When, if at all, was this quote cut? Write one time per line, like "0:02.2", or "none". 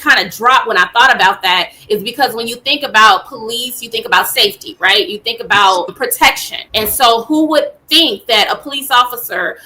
0:06.1